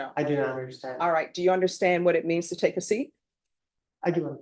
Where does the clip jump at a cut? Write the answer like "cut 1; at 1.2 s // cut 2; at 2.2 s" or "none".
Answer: none